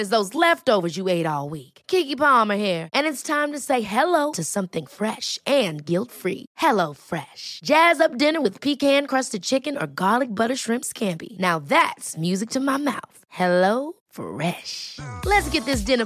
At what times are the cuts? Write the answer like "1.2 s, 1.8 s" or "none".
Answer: none